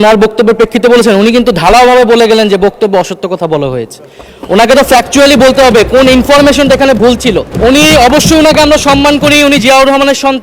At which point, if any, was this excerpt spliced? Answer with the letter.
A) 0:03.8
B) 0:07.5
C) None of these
B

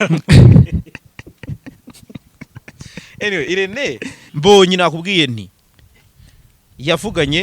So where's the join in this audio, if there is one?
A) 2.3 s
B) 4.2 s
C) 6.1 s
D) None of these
B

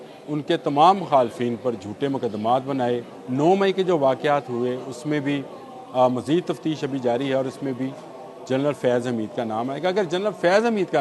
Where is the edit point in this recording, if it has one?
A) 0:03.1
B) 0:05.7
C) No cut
A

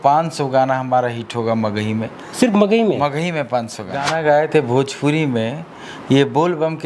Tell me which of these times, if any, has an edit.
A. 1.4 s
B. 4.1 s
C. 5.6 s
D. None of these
B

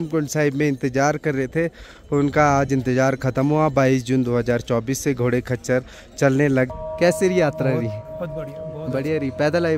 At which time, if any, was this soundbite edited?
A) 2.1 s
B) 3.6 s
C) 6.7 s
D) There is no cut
C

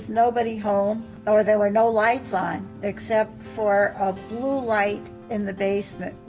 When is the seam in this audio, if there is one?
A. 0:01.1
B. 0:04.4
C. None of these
A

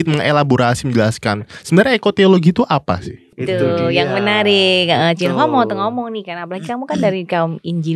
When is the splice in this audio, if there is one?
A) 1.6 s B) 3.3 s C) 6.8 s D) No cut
B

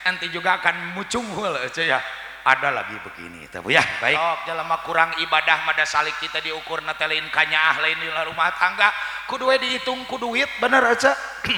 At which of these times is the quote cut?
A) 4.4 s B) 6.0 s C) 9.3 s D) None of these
A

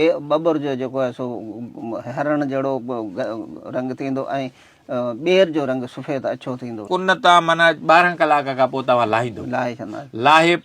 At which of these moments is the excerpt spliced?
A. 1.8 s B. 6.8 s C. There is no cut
B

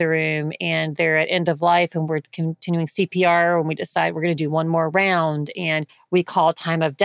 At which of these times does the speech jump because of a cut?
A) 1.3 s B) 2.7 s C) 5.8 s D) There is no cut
D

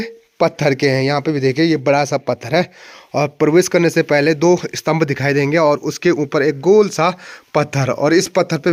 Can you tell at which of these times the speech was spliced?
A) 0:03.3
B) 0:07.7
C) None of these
C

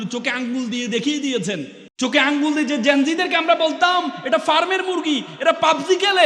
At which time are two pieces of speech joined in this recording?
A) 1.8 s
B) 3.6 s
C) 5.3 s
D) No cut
A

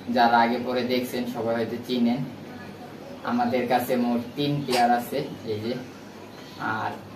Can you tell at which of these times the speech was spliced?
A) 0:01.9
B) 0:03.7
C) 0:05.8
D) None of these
D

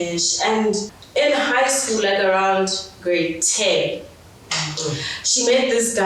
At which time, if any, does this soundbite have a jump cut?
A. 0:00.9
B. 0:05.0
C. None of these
A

